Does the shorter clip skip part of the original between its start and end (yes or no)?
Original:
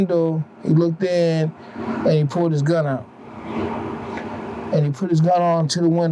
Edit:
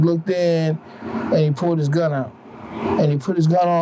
yes